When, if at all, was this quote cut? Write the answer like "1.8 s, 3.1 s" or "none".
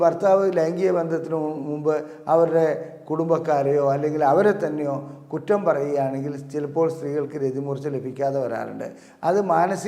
none